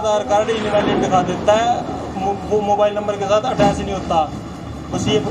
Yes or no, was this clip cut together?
no